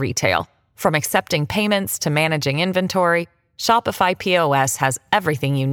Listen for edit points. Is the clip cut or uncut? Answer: uncut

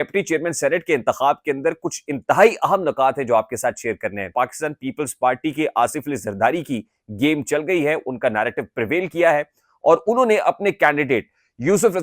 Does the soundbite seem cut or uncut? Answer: cut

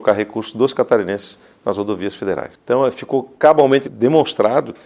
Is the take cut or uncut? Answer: cut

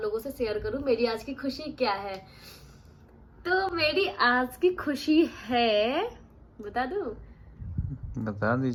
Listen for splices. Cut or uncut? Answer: uncut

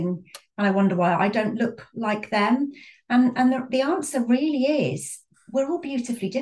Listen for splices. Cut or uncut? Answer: uncut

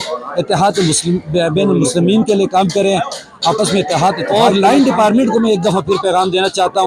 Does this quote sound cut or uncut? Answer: cut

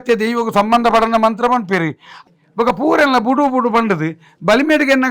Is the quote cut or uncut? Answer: cut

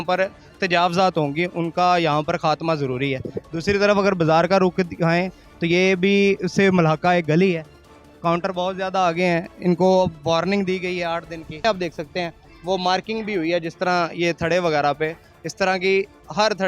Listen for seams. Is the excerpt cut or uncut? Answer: cut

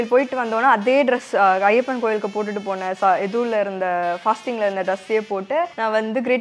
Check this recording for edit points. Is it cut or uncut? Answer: uncut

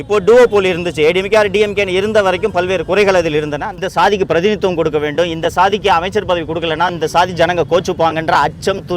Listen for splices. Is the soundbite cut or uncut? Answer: cut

